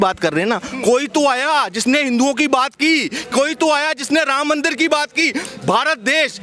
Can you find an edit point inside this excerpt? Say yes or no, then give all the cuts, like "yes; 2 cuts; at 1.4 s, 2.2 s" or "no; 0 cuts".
no; 0 cuts